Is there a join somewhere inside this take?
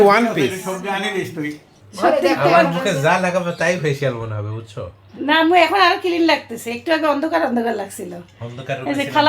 yes; 1 cut; at 1.7 s

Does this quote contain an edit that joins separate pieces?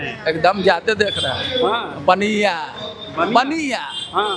no; 0 cuts

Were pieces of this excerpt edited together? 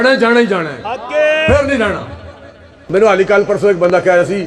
yes; 1 cut; at 2.8 s

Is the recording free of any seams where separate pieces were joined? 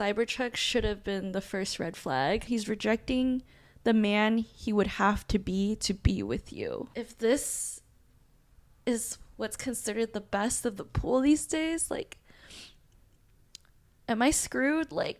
no; 2 cuts; at 2.5 s, 6.9 s

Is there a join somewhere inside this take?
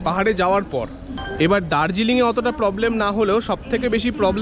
no; 0 cuts

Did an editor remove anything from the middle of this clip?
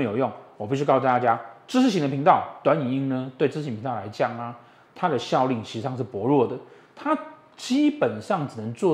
no; 0 cuts

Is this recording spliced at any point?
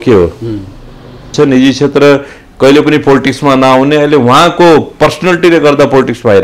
yes; 1 cut; at 1.3 s

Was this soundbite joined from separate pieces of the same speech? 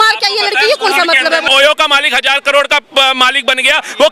yes; 1 cut; at 1.5 s

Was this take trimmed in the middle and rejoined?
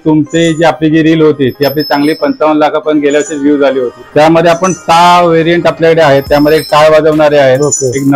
yes; 1 cut; at 4.0 s

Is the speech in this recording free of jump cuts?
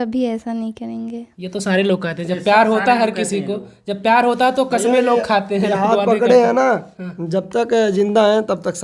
yes; 0 cuts

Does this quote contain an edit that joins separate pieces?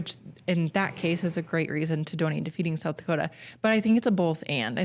no; 0 cuts

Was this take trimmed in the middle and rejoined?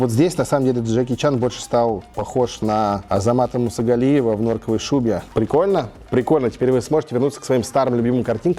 yes; 2 cuts; at 3.0 s, 5.2 s

